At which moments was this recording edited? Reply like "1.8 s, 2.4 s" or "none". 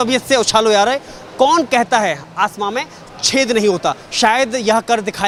none